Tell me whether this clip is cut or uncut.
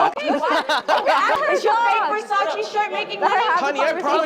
cut